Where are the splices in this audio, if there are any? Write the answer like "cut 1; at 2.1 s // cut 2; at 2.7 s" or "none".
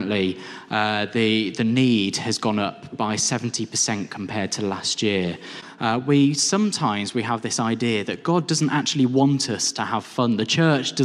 cut 1; at 5.6 s